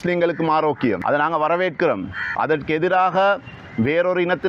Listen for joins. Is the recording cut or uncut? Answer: cut